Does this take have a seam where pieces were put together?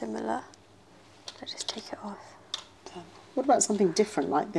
yes; 1 cut; at 2.9 s

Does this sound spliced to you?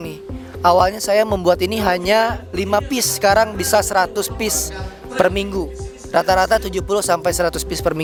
no; 0 cuts

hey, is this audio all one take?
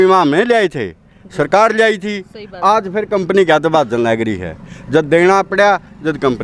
yes; 0 cuts

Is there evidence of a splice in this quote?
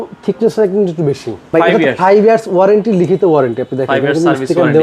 yes; 1 cut; at 1.4 s

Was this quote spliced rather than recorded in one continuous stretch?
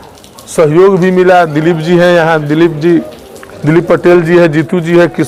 no; 0 cuts

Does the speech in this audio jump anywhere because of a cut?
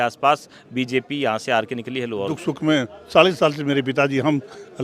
yes; 1 cut; at 2.3 s

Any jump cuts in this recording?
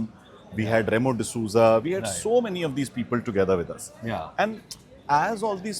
no; 0 cuts

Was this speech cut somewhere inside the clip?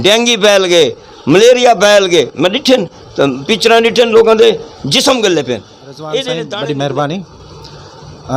yes; 1 cut; at 6.5 s

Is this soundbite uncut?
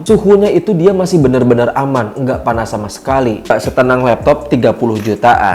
no; 1 cut; at 3.5 s

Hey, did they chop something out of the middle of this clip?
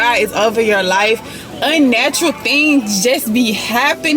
no; 0 cuts

